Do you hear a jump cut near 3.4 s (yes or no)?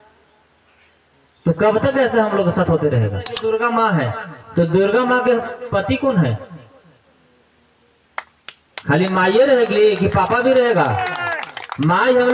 yes